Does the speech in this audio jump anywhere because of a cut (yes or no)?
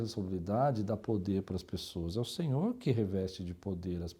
no